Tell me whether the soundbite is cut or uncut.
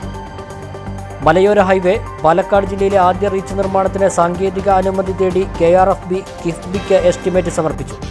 cut